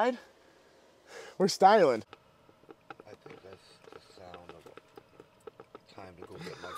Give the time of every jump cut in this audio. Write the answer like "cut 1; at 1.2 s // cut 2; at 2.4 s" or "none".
cut 1; at 2.0 s